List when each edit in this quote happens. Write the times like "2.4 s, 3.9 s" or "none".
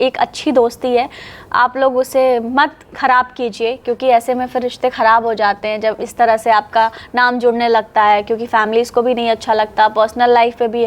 none